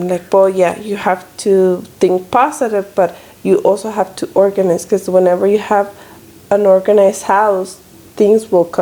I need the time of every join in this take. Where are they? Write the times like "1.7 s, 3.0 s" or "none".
none